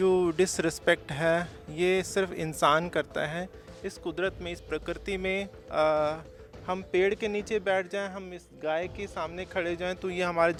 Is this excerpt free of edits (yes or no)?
yes